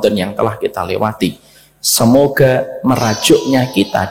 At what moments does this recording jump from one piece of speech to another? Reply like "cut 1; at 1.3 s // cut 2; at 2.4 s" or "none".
none